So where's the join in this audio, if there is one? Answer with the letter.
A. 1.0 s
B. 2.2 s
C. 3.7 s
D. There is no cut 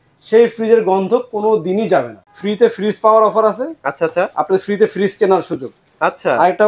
B